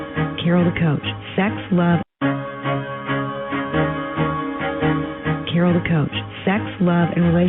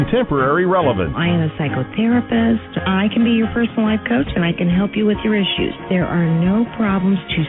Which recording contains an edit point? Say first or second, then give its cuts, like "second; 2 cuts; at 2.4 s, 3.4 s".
first; 1 cut; at 2.0 s